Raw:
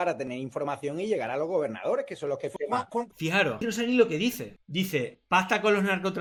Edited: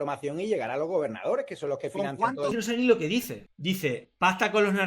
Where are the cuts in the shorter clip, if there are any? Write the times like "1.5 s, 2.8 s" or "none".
2.4 s